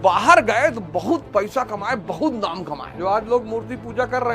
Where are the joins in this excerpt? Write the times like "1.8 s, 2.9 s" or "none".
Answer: 2.8 s